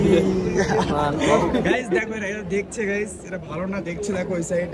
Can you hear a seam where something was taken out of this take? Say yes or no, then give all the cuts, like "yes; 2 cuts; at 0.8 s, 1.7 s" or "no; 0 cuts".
yes; 1 cut; at 0.9 s